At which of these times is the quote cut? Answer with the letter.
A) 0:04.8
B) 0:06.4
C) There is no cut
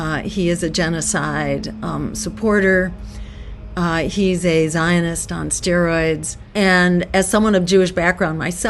B